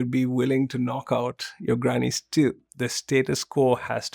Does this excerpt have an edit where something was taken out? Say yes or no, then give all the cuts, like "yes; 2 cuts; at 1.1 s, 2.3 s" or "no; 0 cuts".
yes; 1 cut; at 2.6 s